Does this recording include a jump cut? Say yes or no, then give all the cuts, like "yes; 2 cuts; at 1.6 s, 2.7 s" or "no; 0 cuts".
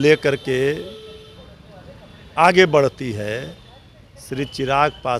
no; 0 cuts